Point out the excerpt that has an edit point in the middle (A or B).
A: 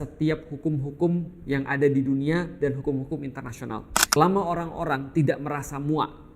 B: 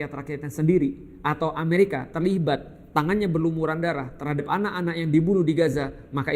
A